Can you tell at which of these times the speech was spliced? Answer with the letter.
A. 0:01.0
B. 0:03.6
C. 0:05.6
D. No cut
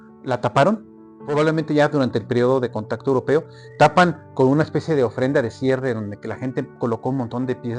D